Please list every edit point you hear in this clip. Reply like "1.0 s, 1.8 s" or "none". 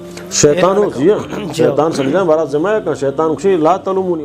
none